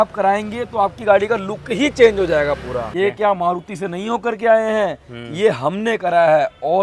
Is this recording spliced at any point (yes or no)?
yes